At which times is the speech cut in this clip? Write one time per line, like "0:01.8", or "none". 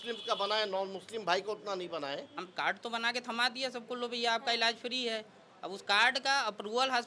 0:02.4